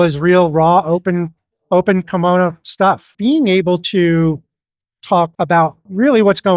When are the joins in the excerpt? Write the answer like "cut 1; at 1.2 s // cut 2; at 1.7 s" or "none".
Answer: cut 1; at 3.1 s // cut 2; at 5.4 s